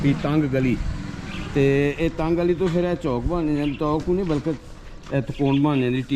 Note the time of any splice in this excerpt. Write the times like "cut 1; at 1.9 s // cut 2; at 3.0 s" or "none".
none